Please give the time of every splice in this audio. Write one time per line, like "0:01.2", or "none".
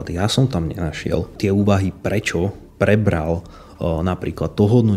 0:01.3